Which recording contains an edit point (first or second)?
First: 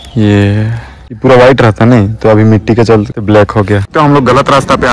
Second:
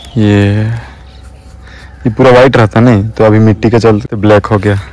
first